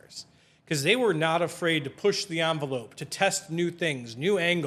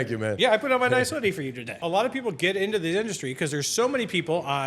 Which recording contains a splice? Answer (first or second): second